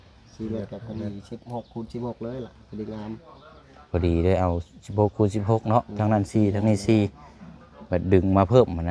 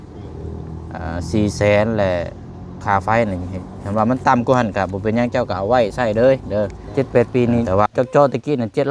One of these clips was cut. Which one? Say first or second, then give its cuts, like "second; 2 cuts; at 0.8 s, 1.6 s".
second; 1 cut; at 6.8 s